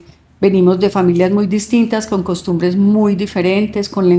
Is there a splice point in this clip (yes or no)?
no